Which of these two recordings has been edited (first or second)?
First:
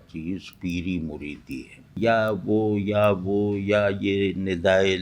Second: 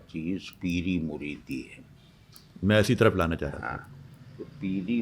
first